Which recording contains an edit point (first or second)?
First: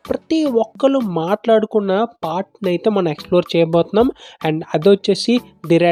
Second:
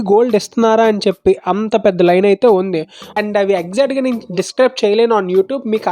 second